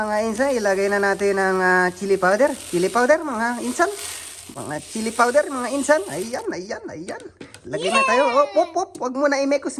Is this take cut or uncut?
uncut